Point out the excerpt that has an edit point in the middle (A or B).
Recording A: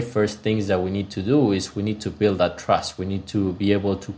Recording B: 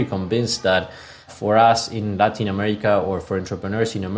B